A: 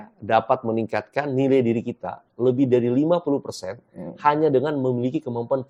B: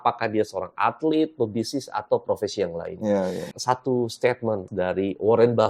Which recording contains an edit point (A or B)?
B